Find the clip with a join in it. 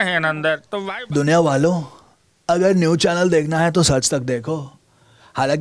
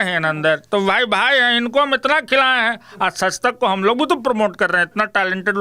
first; 1 cut; at 0.9 s

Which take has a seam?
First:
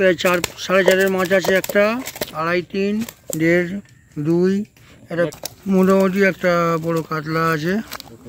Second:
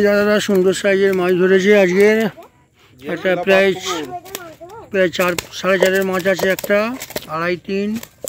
first; 1 cut; at 5.3 s

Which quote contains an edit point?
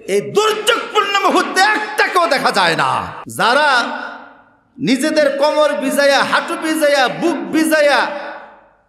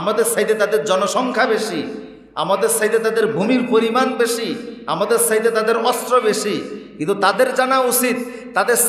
first; 1 cut; at 3.2 s

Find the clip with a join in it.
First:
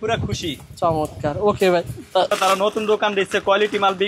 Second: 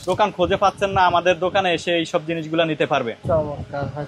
first; 1 cut; at 2.3 s

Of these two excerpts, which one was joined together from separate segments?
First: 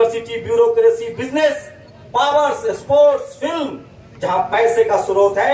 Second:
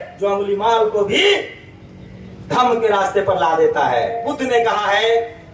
second; 1 cut; at 4.2 s

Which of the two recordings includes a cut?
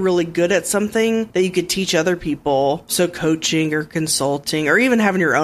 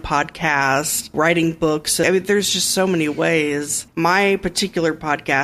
second; 3 cuts; at 1.1 s, 2.0 s, 3.8 s

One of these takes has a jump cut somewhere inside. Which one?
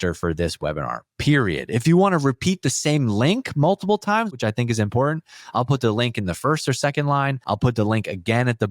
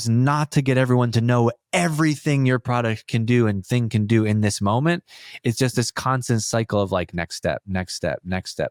first; 2 cuts; at 4.4 s, 7.4 s

